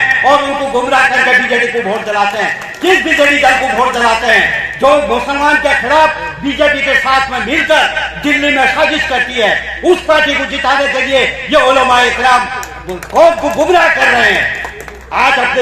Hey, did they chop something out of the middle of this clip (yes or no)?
no